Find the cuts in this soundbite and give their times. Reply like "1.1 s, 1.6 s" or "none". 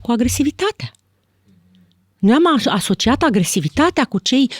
none